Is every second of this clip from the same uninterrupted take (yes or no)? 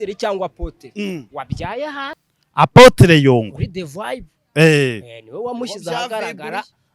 no